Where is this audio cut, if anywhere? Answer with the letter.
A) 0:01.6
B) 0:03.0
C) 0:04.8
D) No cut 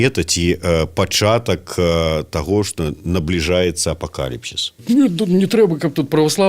C